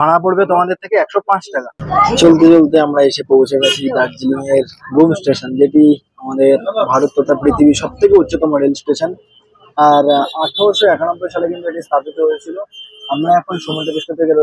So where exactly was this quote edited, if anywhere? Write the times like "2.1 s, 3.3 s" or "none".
1.8 s